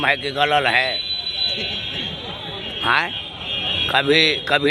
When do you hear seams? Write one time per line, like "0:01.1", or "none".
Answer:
none